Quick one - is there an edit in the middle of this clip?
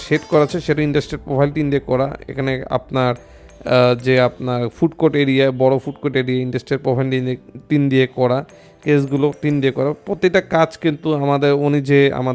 no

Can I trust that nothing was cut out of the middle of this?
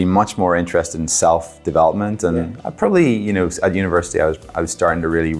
yes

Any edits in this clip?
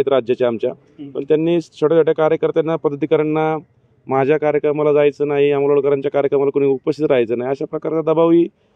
no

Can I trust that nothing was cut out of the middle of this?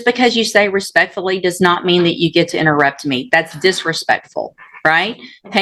yes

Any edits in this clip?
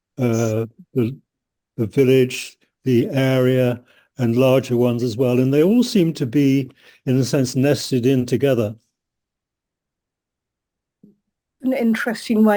no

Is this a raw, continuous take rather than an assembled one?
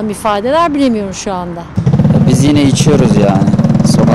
yes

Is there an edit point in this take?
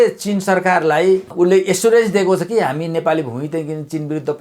yes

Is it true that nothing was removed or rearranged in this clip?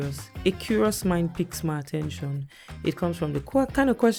yes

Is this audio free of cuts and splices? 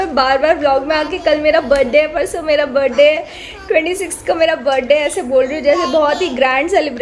yes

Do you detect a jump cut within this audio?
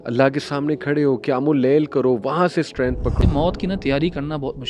yes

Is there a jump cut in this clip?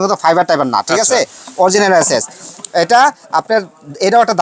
no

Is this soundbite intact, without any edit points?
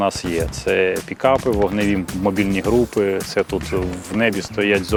yes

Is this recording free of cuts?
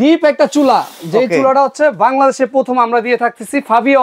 yes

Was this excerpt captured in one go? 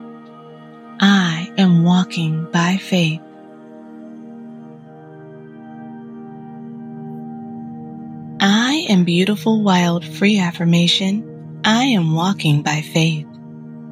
yes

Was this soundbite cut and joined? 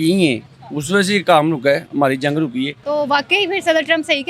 yes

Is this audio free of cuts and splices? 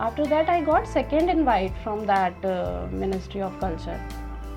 yes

